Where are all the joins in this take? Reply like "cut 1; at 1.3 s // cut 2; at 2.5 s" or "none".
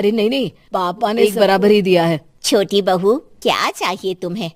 cut 1; at 1.3 s

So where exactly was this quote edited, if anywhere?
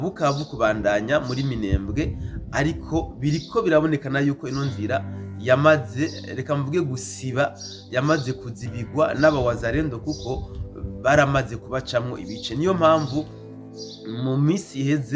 none

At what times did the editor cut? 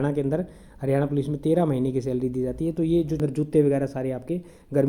cut 1; at 3.2 s

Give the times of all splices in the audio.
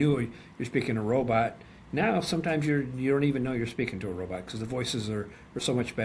none

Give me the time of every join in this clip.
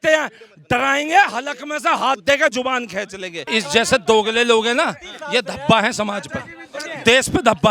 cut 1; at 3.4 s

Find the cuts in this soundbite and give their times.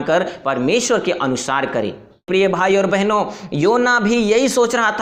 cut 1; at 2.3 s

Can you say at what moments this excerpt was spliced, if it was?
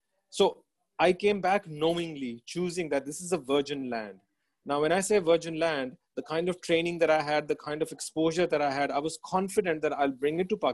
none

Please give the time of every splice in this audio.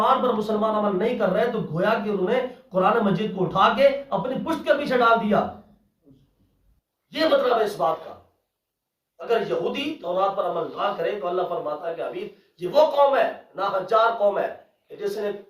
none

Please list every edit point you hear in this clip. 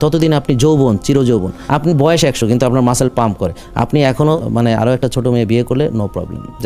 cut 1; at 1.6 s // cut 2; at 4.4 s

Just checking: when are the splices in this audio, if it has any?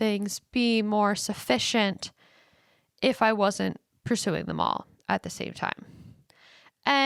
none

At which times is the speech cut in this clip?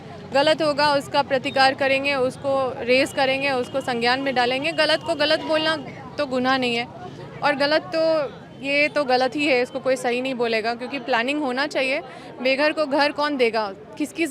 none

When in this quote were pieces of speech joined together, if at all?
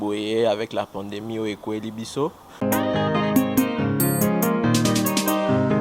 cut 1; at 2.4 s

